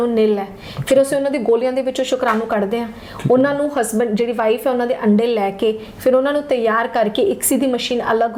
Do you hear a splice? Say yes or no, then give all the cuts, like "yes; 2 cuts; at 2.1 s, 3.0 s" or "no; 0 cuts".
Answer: no; 0 cuts